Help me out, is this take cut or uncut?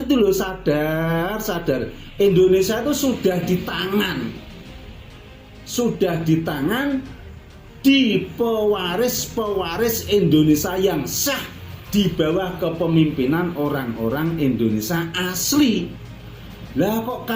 uncut